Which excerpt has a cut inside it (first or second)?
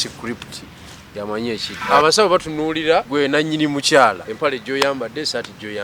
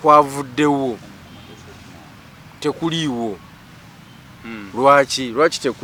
first